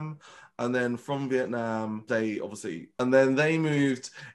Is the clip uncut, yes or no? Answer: no